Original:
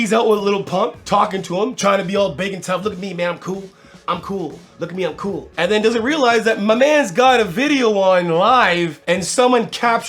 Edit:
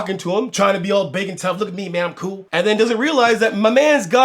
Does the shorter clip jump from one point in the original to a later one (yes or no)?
yes